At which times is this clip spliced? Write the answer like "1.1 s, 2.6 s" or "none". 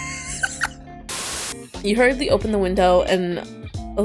1.2 s